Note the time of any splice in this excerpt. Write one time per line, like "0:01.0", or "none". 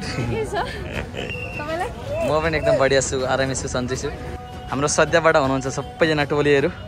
0:04.4